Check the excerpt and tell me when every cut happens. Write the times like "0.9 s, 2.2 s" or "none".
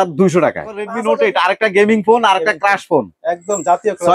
0.9 s